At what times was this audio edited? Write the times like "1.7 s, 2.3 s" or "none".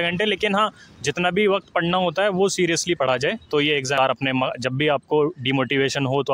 4.0 s